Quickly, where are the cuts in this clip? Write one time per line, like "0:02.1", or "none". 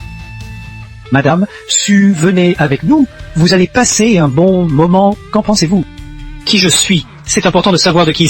0:01.1